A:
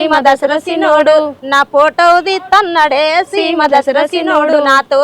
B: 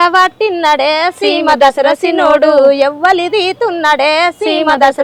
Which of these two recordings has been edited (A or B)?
A